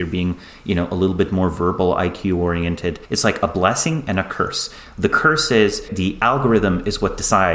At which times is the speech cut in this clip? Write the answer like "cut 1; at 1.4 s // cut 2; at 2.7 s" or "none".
cut 1; at 3.1 s // cut 2; at 5.9 s